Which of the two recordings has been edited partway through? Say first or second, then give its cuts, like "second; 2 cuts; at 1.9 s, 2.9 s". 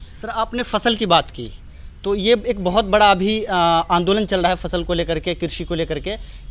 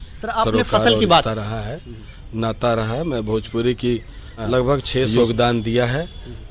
second; 2 cuts; at 1.3 s, 5.1 s